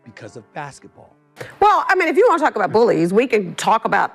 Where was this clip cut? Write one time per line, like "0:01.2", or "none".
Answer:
0:01.4